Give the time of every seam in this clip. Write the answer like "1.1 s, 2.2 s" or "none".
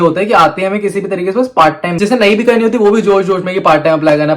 1.9 s